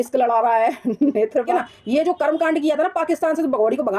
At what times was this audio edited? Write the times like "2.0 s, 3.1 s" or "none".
1.5 s